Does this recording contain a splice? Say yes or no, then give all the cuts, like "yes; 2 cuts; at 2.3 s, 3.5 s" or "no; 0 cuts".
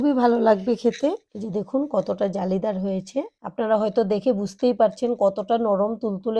yes; 1 cut; at 3.4 s